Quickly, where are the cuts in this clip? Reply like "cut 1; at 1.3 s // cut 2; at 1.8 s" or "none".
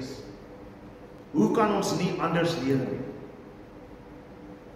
cut 1; at 1.1 s